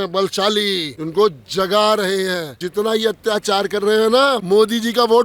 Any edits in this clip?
yes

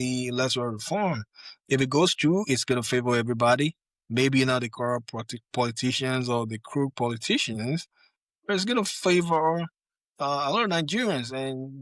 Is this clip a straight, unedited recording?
yes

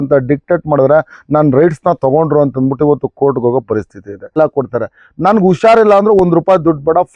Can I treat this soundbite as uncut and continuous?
no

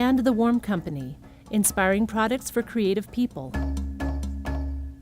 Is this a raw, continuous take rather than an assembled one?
no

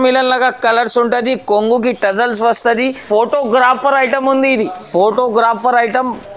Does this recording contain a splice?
yes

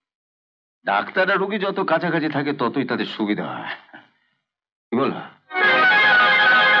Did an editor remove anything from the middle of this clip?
no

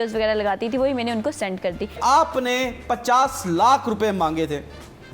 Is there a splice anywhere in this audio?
yes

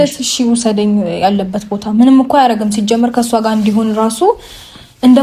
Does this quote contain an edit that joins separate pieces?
no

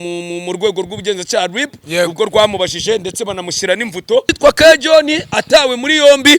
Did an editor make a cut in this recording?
yes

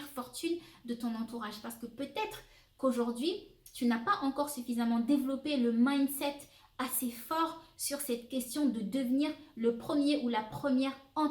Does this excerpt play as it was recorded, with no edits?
yes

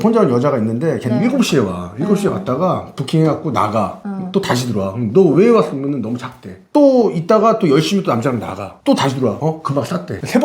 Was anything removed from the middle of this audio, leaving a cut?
no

